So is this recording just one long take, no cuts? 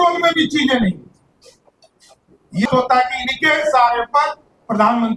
no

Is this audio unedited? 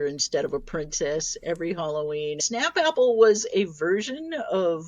no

